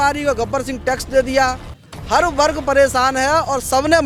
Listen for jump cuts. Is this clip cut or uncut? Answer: uncut